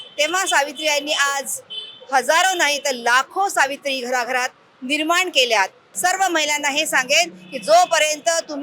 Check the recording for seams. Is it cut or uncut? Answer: cut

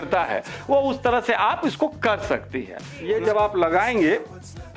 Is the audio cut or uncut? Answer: cut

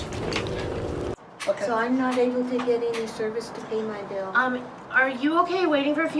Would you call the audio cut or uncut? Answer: cut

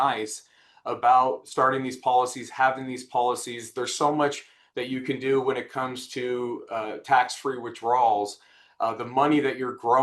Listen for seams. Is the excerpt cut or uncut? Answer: cut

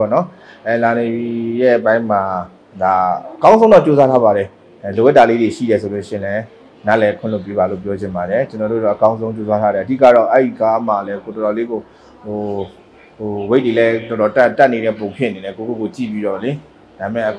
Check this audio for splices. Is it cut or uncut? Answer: uncut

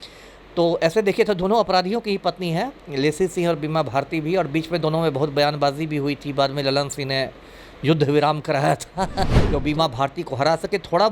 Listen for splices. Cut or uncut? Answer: cut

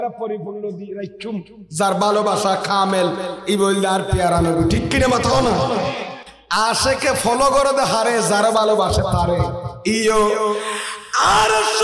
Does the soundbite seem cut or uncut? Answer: cut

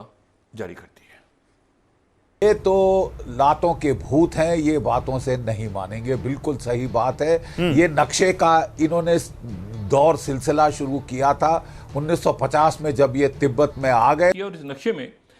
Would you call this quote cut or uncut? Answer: cut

